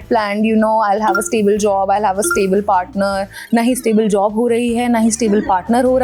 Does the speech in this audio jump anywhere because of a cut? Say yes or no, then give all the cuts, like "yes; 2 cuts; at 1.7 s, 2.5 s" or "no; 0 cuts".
no; 0 cuts